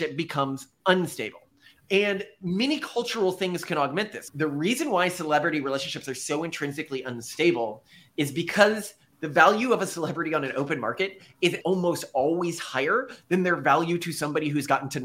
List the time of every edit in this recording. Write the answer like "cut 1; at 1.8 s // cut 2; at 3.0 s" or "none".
cut 1; at 4.2 s // cut 2; at 11.6 s